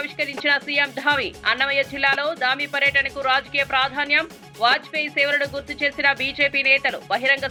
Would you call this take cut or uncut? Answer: uncut